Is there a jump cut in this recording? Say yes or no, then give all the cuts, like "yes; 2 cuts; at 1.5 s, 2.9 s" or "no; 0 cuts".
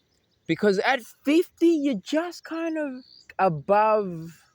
yes; 1 cut; at 3.3 s